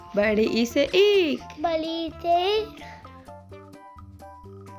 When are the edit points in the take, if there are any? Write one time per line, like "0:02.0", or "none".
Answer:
0:02.7